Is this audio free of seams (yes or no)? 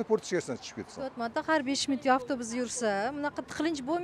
yes